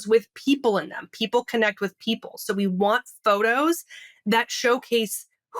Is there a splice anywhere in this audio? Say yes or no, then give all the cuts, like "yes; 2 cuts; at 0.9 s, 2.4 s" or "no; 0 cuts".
no; 0 cuts